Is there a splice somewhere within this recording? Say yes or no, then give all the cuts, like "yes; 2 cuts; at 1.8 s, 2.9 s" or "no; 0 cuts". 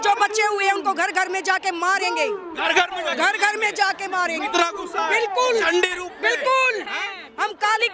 no; 0 cuts